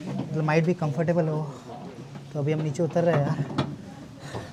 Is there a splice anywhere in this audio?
no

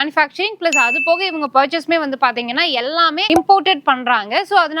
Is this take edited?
yes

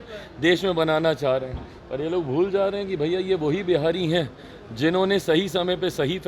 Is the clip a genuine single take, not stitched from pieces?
yes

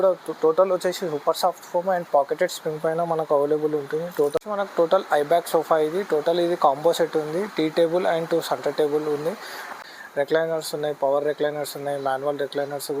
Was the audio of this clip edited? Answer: yes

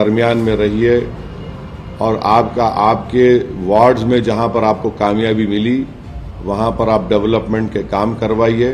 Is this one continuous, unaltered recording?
yes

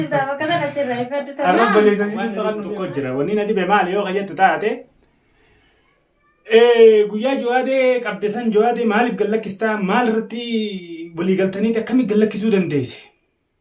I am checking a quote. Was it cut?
yes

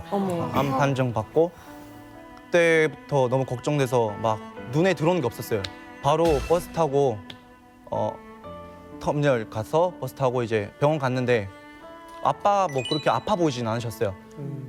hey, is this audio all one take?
yes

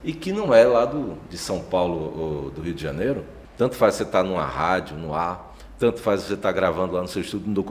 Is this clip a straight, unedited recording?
no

